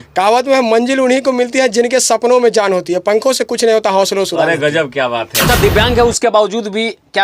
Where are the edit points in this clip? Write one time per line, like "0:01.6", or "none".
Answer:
0:05.4